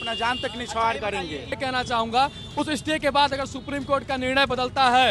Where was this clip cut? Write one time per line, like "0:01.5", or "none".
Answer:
0:01.6